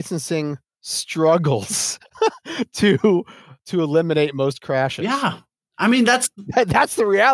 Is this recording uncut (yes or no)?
no